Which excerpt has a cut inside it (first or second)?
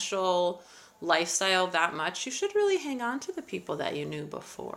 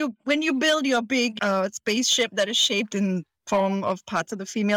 second